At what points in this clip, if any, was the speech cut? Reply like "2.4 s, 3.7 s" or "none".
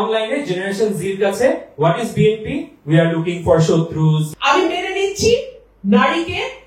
4.3 s